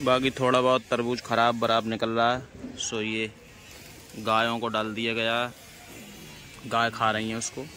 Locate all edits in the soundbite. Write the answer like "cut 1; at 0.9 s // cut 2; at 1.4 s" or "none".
none